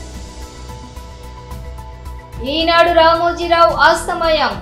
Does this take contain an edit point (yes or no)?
yes